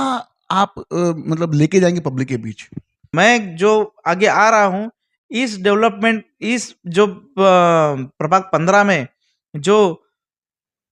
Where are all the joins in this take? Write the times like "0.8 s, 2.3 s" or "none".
3.0 s

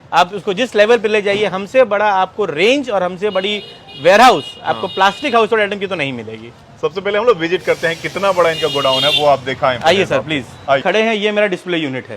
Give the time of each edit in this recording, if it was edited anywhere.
10.8 s

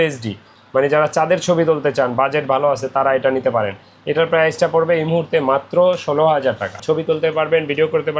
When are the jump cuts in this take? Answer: 6.8 s

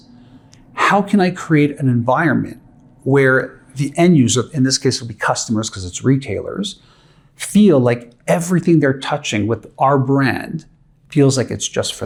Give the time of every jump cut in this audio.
none

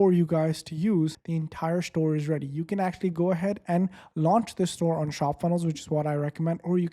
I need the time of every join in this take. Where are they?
1.2 s

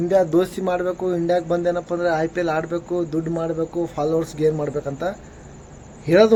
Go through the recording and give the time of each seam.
none

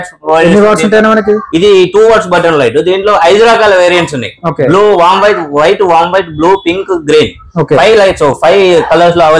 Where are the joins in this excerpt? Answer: none

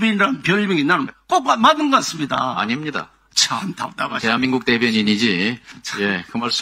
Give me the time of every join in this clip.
none

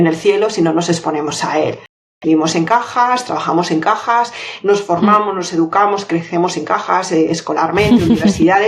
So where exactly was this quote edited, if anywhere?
2.0 s

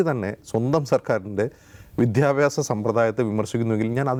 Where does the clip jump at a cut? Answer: none

